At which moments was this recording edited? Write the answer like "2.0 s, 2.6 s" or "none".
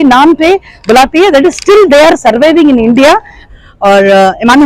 3.4 s